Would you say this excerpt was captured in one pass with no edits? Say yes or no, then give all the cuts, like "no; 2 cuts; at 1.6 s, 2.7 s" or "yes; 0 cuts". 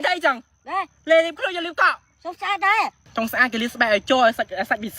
no; 1 cut; at 3.1 s